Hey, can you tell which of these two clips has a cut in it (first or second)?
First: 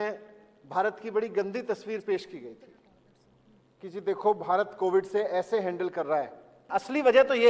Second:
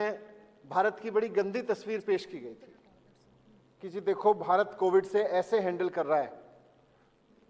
first